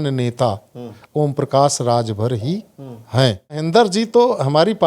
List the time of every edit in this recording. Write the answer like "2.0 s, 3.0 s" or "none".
3.7 s